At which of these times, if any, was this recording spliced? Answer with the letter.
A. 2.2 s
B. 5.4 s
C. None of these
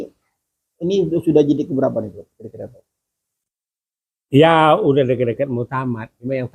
C